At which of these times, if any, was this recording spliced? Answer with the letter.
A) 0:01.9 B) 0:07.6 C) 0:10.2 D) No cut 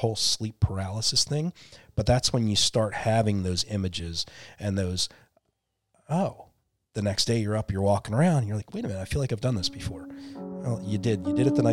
D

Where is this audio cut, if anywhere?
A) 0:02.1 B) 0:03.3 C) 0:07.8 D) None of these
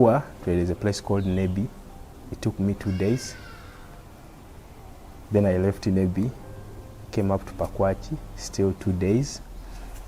D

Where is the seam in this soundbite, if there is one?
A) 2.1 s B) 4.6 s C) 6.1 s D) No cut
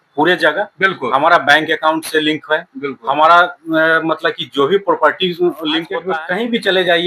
C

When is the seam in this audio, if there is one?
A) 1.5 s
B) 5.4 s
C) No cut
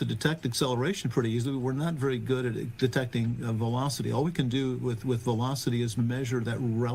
A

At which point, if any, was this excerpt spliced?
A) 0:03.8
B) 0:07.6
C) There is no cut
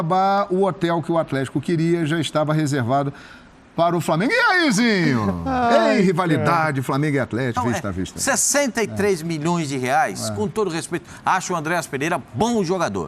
B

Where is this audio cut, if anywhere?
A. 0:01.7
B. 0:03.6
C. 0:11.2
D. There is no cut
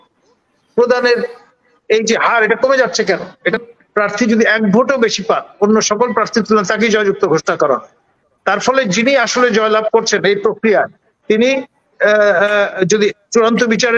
B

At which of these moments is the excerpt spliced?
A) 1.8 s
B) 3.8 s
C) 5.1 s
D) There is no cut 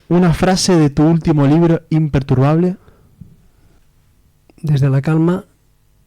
B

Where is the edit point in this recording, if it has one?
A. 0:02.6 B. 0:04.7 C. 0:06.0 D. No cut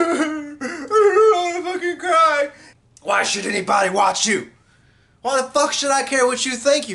A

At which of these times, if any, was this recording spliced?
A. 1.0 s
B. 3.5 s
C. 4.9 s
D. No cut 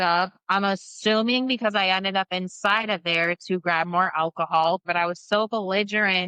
C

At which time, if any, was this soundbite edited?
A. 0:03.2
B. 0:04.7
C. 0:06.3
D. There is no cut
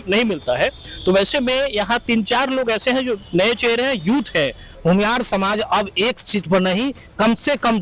B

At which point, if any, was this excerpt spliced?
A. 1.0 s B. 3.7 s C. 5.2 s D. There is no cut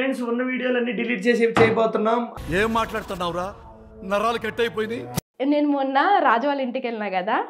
C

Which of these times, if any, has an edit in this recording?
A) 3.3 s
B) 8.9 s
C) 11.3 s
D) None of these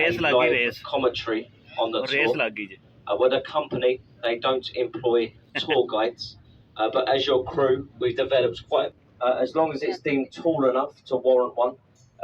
B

